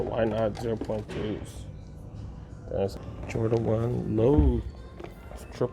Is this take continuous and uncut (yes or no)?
no